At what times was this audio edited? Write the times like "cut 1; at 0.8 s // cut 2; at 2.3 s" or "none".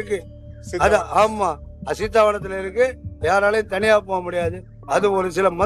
cut 1; at 3.1 s // cut 2; at 4.7 s